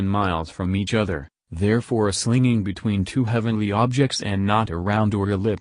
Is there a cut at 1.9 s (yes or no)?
no